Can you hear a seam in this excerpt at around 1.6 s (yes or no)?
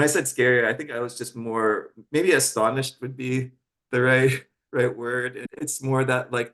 no